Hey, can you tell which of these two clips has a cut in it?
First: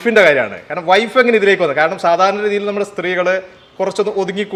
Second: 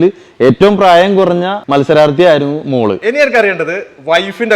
second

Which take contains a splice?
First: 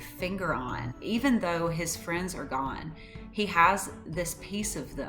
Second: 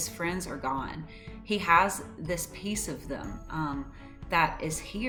first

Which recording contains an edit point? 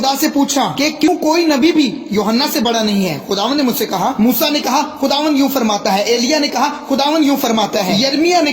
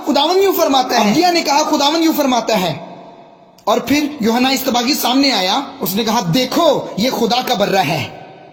first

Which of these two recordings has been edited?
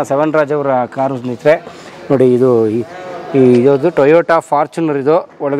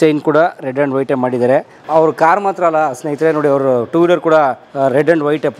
second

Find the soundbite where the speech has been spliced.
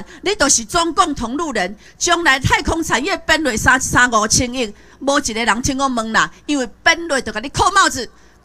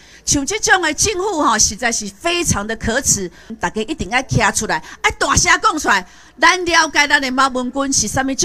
second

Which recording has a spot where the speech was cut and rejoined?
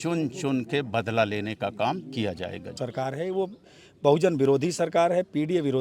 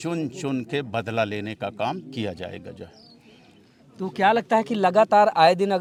first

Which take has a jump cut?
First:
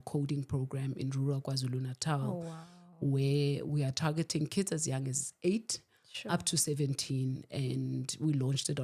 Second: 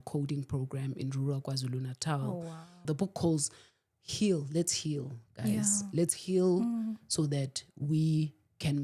second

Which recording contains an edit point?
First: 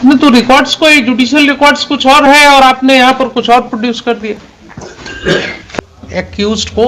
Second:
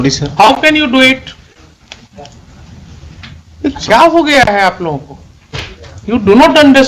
first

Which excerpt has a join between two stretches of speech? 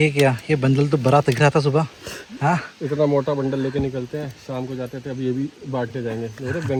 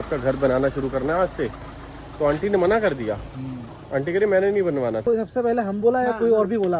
second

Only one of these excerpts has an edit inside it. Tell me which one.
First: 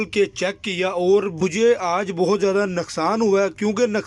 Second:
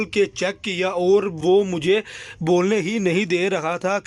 first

